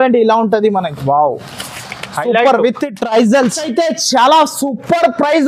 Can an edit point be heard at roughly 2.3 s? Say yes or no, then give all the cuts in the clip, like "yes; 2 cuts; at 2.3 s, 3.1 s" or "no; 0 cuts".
no; 1 cut; at 3.7 s